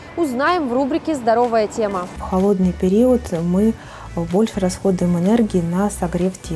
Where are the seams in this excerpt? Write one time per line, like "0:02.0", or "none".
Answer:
0:02.2